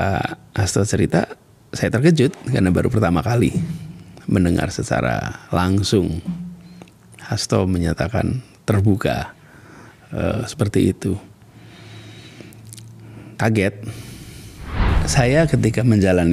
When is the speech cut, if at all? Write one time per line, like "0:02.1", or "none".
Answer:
0:14.9